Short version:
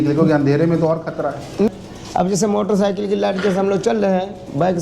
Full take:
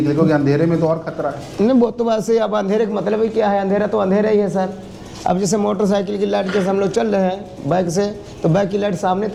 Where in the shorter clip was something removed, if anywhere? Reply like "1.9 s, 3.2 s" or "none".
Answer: 1.7 s